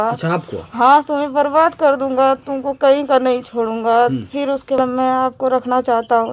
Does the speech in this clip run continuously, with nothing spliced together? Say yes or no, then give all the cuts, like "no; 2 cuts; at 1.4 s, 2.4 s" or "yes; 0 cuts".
no; 1 cut; at 4.8 s